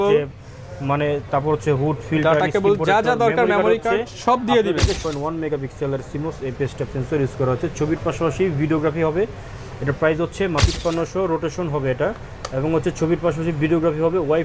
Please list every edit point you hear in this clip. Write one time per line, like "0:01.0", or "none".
0:05.0
0:10.6